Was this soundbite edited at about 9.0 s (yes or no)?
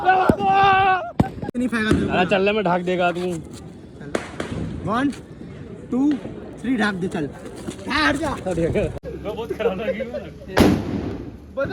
yes